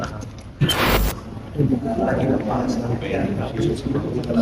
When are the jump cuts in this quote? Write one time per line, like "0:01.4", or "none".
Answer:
0:00.9